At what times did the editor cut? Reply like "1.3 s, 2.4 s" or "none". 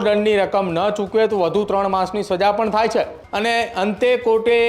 3.2 s